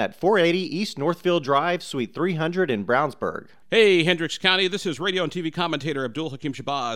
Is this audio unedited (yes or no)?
no